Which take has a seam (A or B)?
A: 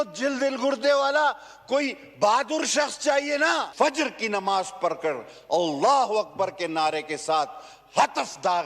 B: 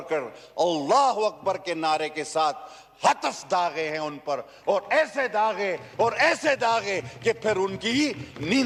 A